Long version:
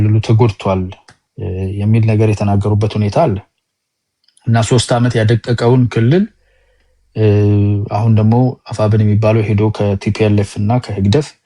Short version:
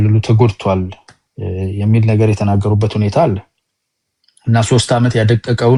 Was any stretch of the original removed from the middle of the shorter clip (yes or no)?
no